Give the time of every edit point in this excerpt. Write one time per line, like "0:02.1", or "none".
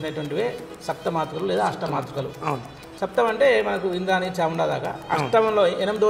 none